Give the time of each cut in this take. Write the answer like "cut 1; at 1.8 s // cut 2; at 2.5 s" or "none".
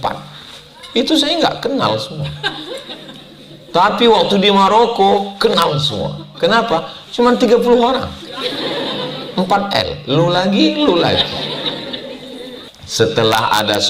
cut 1; at 12.8 s